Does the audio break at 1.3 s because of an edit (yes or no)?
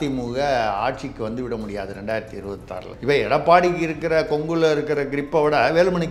no